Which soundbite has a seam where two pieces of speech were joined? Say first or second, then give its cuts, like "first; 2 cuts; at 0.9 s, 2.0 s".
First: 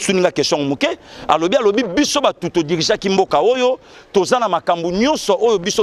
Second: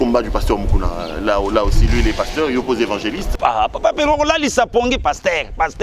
second; 1 cut; at 3.2 s